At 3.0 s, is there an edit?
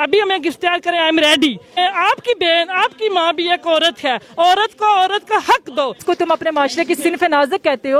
no; 2 cuts; at 1.7 s, 6.0 s

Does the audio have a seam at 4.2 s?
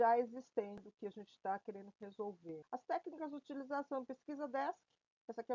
no; 2 cuts; at 0.9 s, 2.6 s

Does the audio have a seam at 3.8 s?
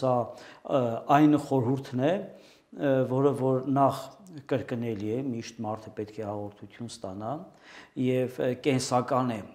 no; 0 cuts

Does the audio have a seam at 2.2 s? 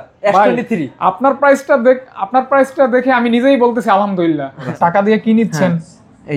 no; 1 cut; at 4.6 s

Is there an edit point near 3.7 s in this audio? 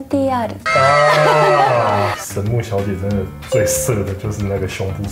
no; 1 cut; at 2.2 s

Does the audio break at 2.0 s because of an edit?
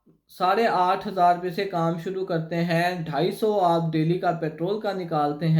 no; 0 cuts

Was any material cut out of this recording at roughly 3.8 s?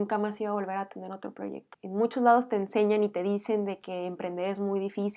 no; 1 cut; at 1.7 s

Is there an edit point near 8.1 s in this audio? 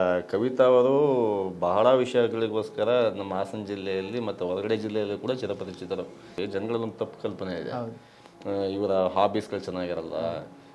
no; 1 cut; at 6.3 s

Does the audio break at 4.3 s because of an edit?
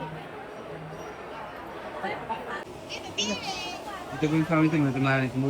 no; 1 cut; at 2.7 s

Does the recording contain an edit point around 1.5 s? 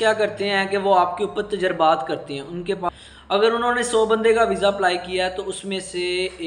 no; 1 cut; at 2.8 s

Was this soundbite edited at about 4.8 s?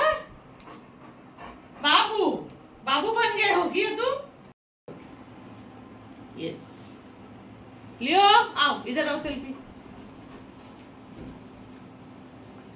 yes; 1 cut; at 4.8 s

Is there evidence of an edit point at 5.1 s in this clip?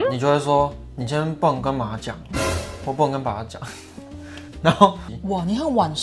yes; 1 cut; at 5.1 s

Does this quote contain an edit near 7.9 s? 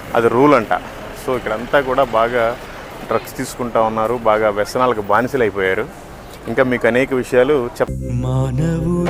yes; 1 cut; at 7.9 s

